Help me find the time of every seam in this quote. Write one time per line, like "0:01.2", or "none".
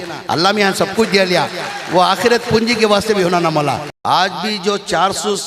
0:03.9